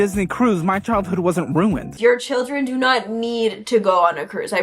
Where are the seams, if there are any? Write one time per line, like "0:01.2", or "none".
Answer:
0:01.9